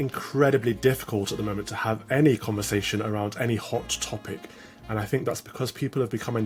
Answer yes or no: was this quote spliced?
no